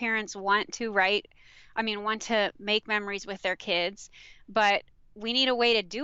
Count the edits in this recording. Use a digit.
0